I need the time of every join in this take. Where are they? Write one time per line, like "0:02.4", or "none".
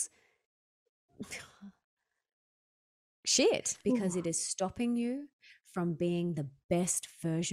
0:03.7